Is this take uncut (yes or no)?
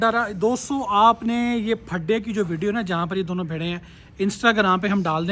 yes